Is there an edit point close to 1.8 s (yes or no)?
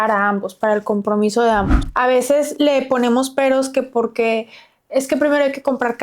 yes